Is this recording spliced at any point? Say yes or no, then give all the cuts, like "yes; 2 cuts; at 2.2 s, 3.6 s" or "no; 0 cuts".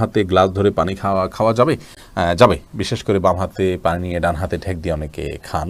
no; 0 cuts